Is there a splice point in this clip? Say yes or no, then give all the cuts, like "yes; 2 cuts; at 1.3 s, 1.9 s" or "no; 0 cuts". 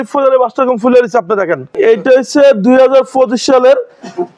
yes; 1 cut; at 1.7 s